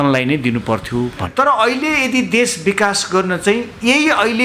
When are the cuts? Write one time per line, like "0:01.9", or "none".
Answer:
0:01.2

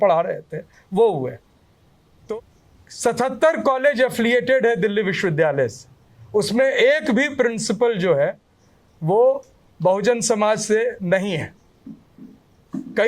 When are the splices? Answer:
0:02.2

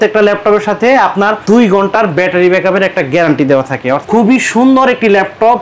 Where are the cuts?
0:04.0

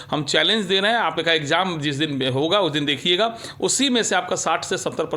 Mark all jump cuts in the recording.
none

